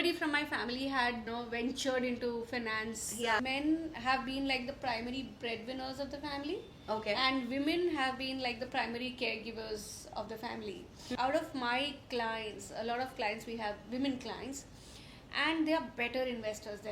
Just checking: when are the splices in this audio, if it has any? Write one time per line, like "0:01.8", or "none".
0:01.3
0:03.4
0:10.9